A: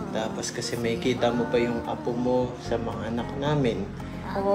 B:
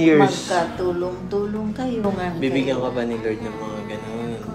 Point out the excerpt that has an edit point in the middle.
B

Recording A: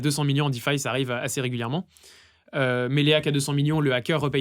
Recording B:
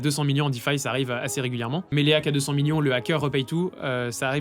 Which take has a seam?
B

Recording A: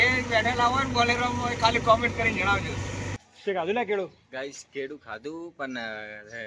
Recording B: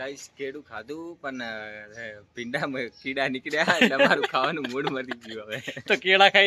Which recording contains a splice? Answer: A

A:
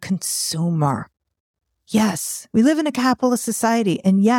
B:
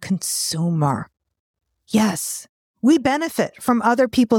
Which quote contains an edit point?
B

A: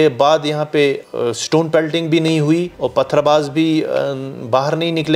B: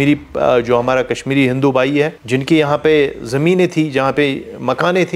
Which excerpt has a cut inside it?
A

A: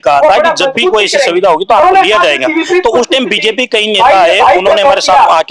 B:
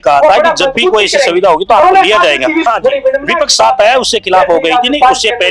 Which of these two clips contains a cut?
B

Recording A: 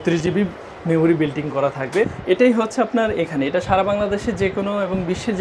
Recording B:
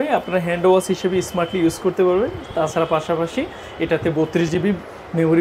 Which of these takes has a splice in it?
A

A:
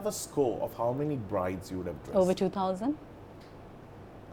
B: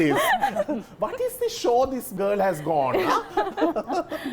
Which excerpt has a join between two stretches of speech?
B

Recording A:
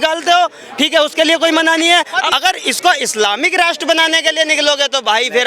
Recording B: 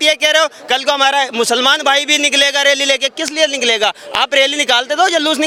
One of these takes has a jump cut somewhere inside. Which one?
A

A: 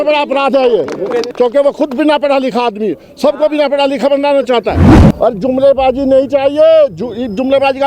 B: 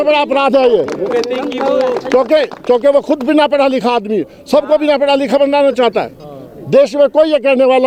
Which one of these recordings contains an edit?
A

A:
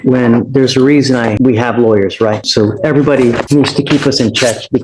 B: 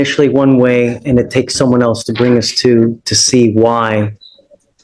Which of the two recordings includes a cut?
A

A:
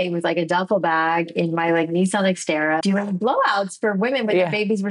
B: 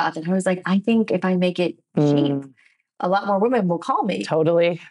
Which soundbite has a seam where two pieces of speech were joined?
A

